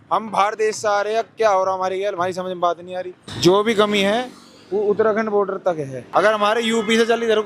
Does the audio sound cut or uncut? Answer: cut